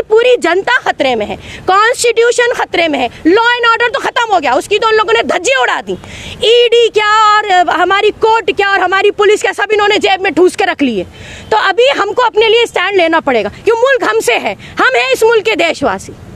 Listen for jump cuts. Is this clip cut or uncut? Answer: uncut